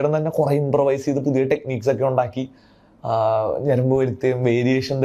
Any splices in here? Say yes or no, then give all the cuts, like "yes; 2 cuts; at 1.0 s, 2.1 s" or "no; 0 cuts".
no; 0 cuts